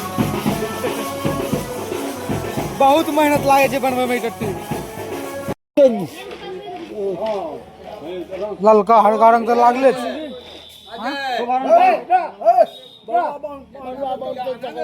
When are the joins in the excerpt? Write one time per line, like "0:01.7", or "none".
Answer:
0:05.5

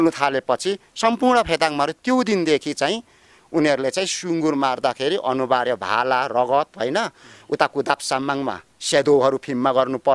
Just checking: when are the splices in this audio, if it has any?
none

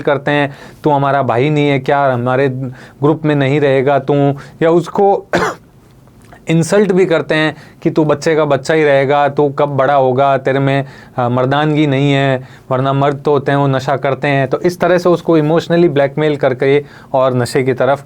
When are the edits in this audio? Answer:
none

